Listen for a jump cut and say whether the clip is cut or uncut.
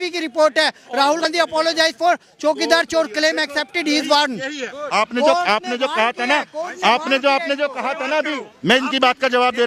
cut